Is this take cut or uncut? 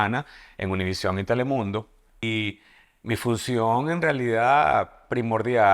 cut